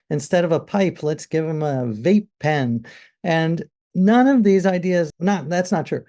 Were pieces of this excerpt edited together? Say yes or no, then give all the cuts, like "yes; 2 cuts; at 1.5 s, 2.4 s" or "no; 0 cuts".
yes; 2 cuts; at 3.8 s, 5.1 s